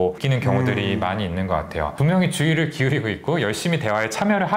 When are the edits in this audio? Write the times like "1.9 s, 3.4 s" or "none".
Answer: none